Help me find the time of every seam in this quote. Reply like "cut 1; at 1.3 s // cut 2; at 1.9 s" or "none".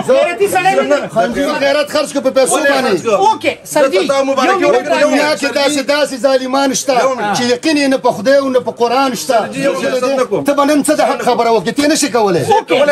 cut 1; at 1.5 s // cut 2; at 9.8 s